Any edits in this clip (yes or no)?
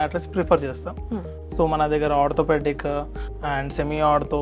no